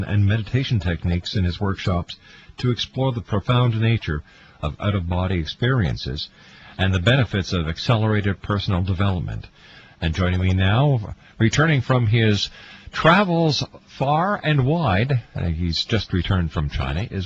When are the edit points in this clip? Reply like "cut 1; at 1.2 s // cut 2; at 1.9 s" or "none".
cut 1; at 7.8 s

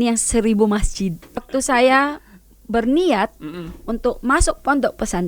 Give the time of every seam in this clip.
cut 1; at 1.4 s

